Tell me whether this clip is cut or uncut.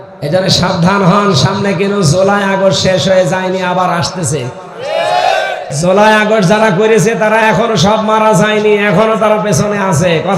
cut